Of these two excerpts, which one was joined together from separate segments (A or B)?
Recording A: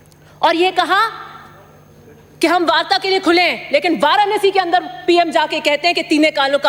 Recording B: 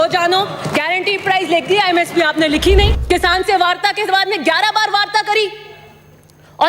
B